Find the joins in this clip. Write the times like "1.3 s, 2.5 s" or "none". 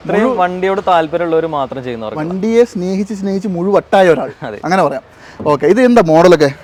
none

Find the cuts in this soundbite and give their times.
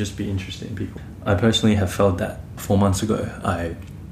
1.1 s, 2.5 s

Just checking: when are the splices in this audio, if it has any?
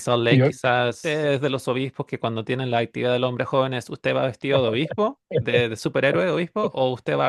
1.0 s

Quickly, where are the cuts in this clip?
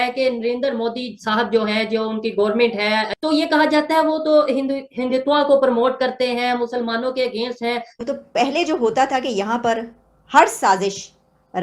7.9 s

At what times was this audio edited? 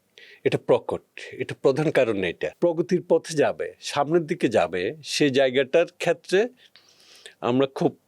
2.5 s

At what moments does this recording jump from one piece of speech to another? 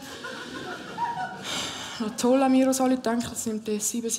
1.5 s

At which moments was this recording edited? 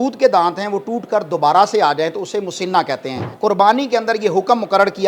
3.2 s

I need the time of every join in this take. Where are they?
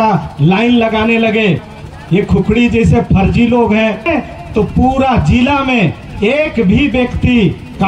1.7 s, 4.1 s

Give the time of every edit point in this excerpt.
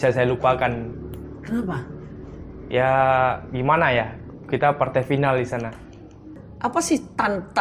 6.4 s

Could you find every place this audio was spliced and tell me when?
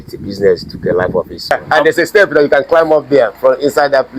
1.6 s

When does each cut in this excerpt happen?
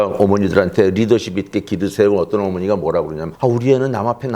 none

